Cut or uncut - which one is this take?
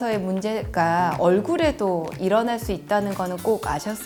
uncut